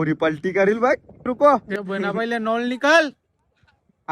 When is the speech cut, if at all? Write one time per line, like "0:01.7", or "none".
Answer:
0:01.3